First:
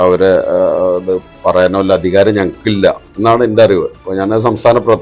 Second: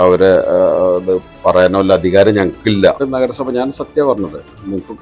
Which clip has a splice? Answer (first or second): second